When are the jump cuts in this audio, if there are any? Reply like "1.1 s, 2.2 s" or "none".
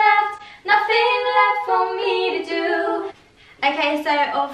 3.2 s